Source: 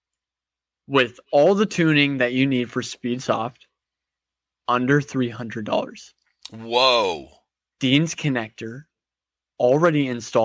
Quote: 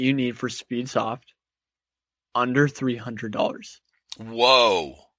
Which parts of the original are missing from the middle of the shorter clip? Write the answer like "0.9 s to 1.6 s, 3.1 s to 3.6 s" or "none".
none